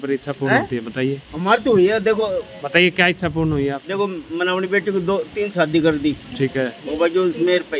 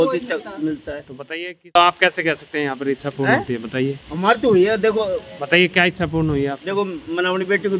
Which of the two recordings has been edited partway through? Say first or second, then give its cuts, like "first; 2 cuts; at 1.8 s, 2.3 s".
second; 1 cut; at 1.7 s